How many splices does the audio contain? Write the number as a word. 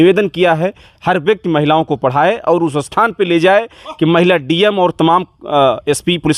zero